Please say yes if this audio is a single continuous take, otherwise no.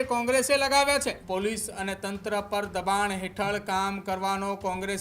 no